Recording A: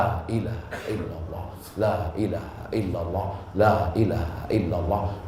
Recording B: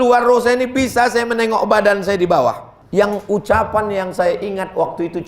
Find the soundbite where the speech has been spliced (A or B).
B